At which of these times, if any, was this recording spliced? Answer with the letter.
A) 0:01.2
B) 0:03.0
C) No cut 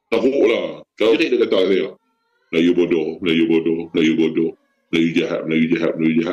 A